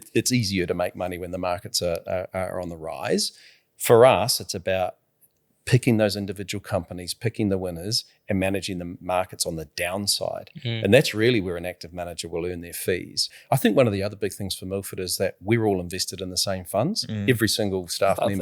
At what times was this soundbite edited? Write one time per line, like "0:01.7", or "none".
0:13.3